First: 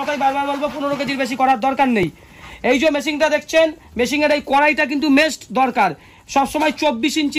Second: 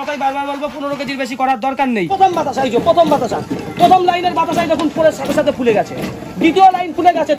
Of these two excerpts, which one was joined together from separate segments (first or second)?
second